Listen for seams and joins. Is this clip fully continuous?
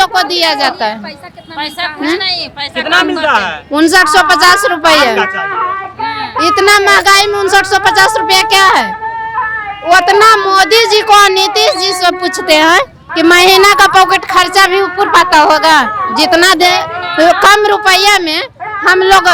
yes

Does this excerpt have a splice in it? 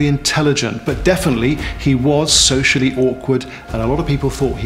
no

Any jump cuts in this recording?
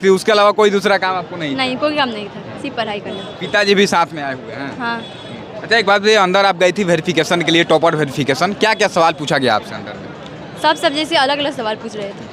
no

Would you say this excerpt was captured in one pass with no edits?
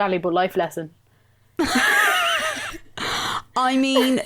yes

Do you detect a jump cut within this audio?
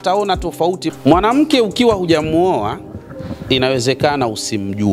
yes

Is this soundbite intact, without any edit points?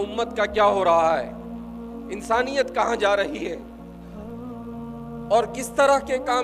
no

